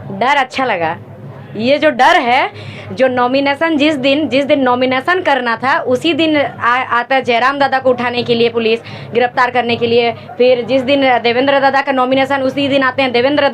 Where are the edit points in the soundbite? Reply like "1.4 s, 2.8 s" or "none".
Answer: none